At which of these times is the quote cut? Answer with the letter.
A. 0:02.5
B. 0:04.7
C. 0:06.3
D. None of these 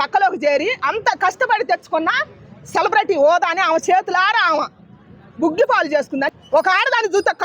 C